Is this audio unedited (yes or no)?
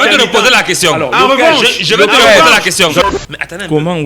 no